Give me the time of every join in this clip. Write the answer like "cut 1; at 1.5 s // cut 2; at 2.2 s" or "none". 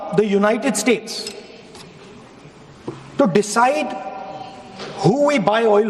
cut 1; at 1.6 s